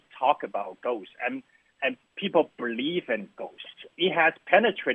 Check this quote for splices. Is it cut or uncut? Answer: cut